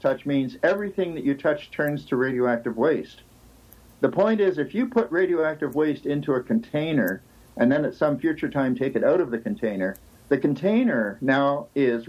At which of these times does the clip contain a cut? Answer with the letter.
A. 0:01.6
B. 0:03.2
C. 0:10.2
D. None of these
D